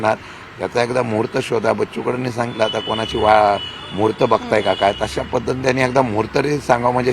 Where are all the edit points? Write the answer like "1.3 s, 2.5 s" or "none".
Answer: none